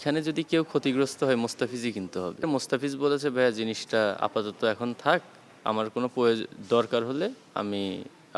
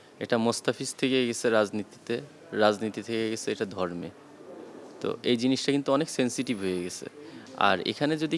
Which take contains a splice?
first; 1 cut; at 2.4 s

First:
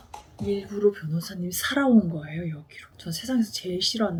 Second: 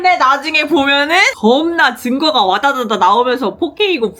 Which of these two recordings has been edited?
second; 1 cut; at 1.3 s

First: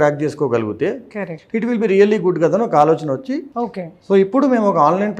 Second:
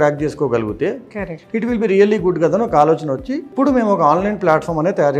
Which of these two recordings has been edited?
second; 1 cut; at 3.5 s

